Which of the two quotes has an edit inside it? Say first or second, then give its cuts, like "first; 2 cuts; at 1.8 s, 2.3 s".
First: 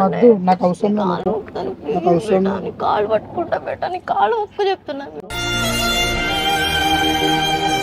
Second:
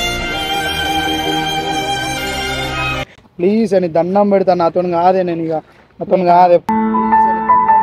second; 1 cut; at 3.1 s